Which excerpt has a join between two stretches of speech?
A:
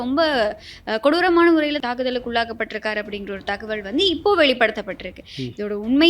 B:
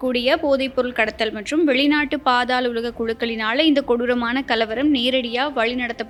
A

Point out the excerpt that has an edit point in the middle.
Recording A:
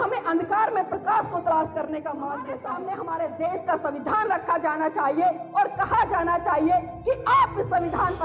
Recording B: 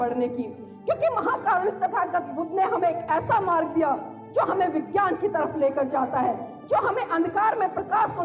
A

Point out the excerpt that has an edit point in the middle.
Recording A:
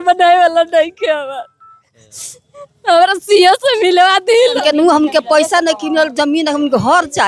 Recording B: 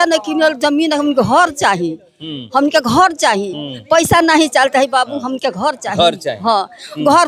A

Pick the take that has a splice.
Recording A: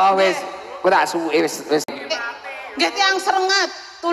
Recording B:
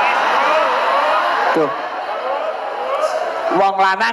A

